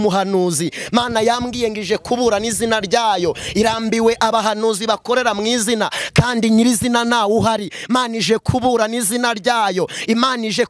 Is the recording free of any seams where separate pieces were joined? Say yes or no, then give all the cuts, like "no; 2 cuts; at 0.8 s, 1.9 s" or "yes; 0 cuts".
yes; 0 cuts